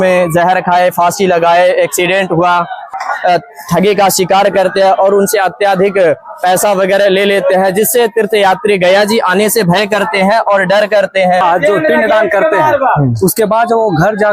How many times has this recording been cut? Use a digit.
2